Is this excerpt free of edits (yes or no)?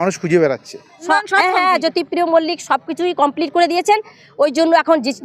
no